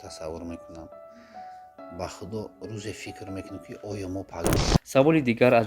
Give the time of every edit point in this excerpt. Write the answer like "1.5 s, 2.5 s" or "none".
4.7 s